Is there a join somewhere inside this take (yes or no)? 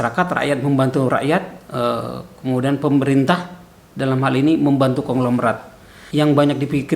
yes